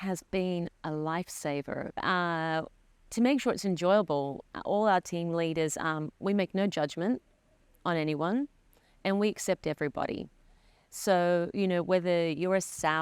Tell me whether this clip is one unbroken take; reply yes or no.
no